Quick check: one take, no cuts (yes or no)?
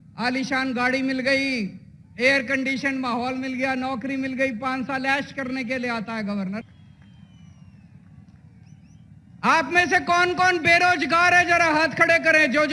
no